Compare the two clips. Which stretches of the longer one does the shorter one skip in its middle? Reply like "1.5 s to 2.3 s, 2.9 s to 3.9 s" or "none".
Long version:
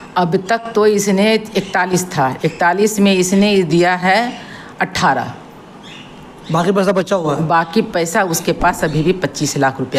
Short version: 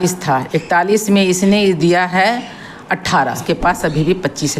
5.3 s to 8.4 s